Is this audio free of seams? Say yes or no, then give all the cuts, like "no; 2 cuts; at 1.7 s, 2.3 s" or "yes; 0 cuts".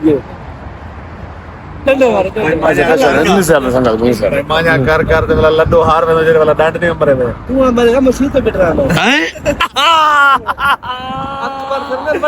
no; 1 cut; at 9.6 s